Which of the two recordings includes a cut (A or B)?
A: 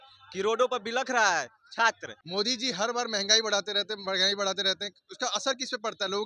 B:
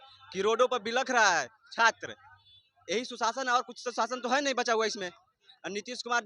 A